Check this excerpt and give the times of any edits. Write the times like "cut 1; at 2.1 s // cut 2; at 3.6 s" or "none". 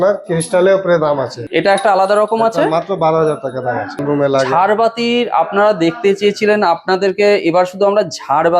cut 1; at 1.4 s // cut 2; at 4.0 s